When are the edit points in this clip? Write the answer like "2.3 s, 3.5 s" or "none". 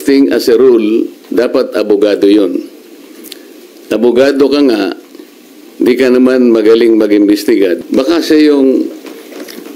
7.8 s